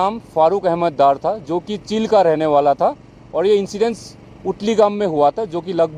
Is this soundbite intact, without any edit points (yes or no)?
yes